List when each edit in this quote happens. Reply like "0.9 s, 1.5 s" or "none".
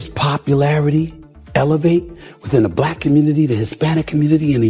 none